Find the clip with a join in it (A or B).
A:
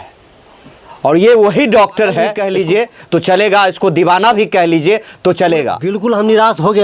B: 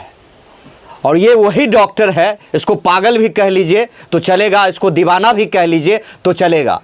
A